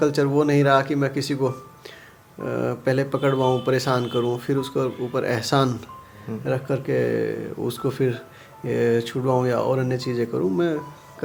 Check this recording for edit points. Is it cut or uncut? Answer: uncut